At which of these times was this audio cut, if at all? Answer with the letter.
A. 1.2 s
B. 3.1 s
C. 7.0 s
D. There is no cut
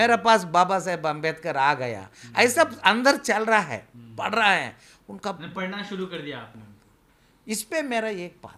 D